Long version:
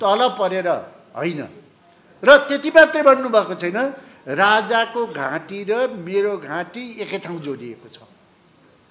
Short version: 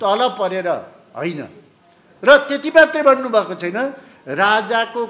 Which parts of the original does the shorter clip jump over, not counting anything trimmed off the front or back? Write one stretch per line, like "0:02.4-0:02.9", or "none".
none